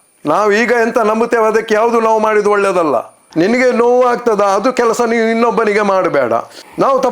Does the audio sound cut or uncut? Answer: cut